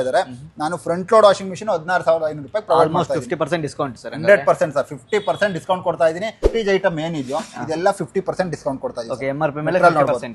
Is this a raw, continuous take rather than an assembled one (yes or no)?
no